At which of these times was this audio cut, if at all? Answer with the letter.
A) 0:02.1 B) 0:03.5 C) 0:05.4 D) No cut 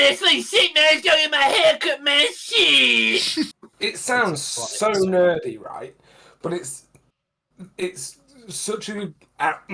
B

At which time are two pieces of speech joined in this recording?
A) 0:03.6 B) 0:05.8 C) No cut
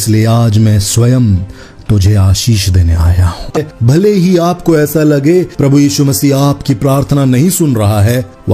A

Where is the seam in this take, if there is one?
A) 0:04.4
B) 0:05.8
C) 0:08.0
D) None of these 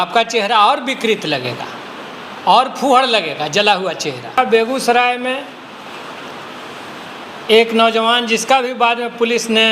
A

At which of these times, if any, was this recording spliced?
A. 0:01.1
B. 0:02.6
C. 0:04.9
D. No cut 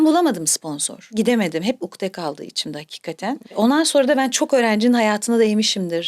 A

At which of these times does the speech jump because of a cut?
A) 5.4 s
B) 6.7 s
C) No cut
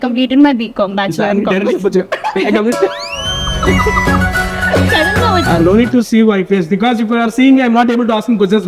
A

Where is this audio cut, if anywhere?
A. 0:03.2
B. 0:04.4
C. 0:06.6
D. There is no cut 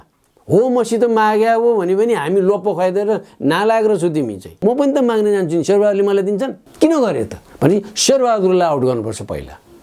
B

